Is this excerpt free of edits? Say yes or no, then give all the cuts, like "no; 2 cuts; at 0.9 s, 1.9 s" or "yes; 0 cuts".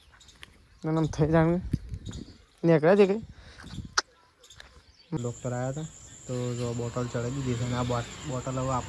no; 1 cut; at 5.2 s